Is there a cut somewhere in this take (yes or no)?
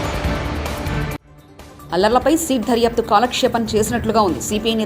yes